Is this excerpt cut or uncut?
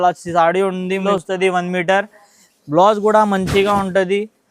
cut